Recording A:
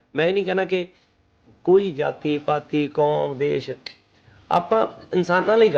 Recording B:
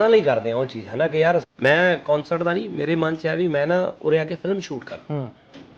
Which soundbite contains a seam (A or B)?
B